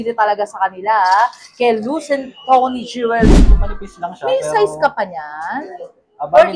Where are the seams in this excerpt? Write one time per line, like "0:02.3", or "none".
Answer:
0:03.5